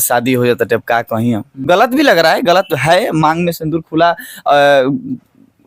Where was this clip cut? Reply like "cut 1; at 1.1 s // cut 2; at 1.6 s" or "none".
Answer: cut 1; at 1.6 s